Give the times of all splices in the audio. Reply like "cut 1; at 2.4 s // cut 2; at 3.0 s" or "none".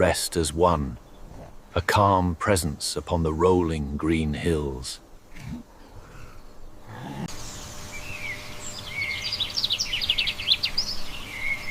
cut 1; at 7.3 s